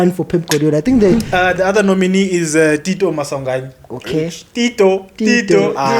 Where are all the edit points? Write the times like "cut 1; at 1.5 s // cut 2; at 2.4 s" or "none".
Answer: cut 1; at 1.3 s